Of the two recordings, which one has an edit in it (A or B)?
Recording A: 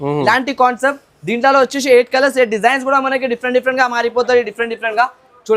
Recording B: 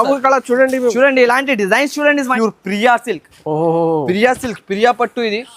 B